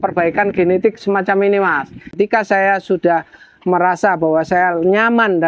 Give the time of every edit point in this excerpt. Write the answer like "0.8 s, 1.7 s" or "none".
2.0 s